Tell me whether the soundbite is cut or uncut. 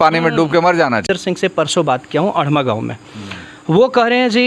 cut